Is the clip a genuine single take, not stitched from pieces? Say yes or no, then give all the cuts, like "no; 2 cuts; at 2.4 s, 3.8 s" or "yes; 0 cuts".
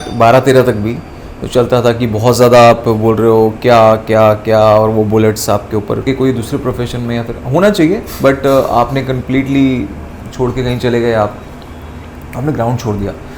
no; 1 cut; at 6.0 s